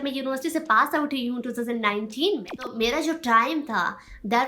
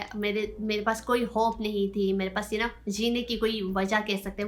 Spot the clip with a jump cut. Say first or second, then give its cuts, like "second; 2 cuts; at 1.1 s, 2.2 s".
first; 1 cut; at 2.6 s